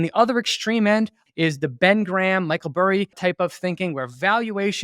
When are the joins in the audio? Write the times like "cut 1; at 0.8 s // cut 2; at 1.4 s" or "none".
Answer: cut 1; at 1.2 s // cut 2; at 3.2 s